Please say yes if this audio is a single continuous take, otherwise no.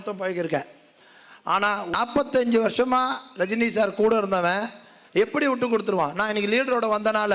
no